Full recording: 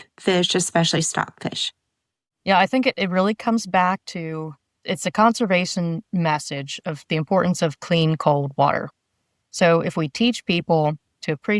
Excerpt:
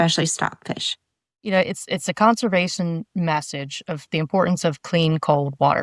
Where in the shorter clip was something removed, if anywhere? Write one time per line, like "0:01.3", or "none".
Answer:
0:01.5